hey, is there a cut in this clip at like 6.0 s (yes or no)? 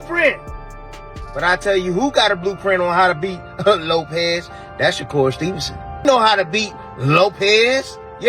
yes